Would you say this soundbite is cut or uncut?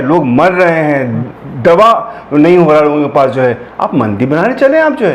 uncut